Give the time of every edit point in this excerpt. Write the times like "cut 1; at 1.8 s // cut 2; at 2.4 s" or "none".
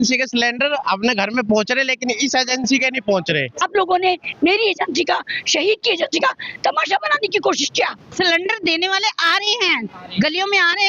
cut 1; at 3.6 s // cut 2; at 8.0 s